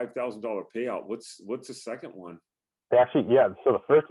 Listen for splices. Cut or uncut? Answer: uncut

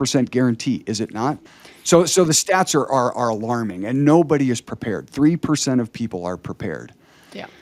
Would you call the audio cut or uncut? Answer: cut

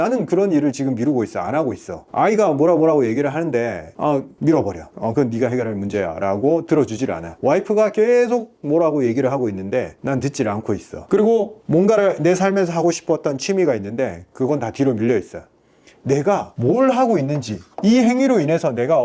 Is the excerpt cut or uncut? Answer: uncut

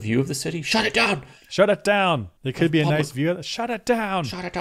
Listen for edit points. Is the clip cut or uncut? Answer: cut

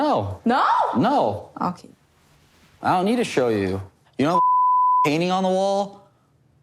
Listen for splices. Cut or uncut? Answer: uncut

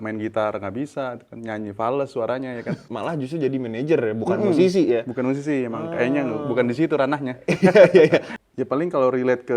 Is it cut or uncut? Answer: cut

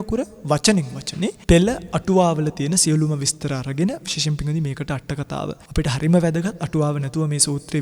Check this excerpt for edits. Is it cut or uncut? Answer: cut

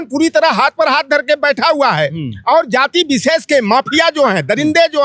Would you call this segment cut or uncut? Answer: uncut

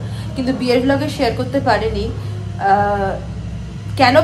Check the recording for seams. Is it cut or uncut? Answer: uncut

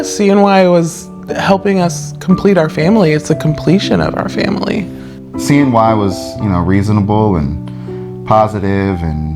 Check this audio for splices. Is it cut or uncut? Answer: cut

